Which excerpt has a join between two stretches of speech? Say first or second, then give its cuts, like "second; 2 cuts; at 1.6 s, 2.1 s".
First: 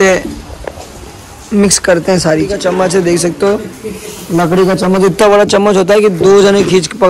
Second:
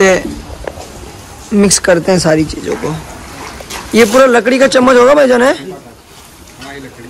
first; 1 cut; at 2.6 s